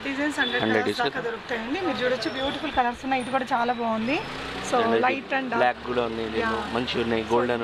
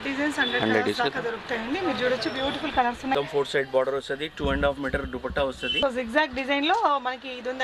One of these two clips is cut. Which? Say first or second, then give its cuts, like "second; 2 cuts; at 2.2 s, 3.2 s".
second; 2 cuts; at 3.1 s, 5.8 s